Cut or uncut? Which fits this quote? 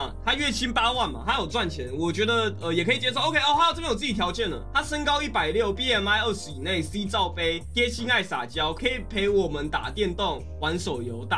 uncut